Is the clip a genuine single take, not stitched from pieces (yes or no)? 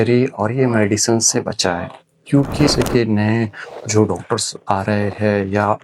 no